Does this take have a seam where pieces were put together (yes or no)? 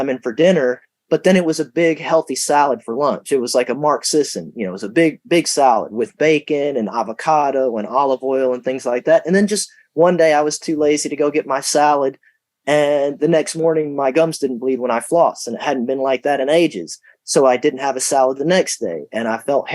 no